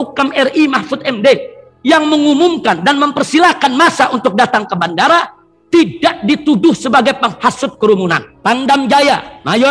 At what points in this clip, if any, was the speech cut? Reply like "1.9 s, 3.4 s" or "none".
8.3 s